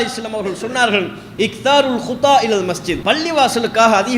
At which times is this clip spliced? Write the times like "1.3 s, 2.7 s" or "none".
2.9 s